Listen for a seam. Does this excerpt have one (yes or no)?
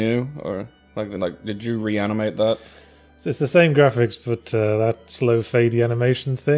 no